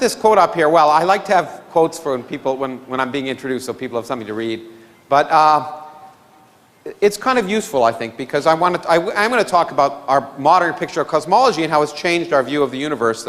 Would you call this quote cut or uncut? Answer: cut